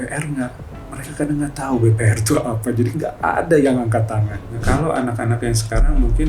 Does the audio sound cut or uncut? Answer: cut